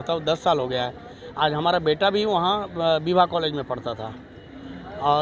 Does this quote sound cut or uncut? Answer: uncut